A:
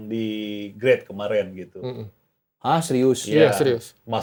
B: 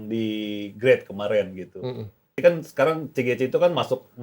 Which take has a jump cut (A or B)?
B